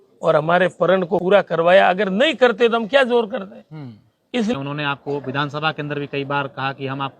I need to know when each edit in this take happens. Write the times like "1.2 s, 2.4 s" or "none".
1.2 s, 4.5 s